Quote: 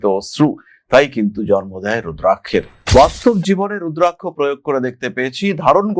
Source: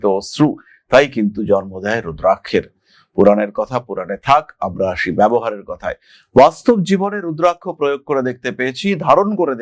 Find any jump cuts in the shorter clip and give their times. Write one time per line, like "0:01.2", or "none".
0:02.8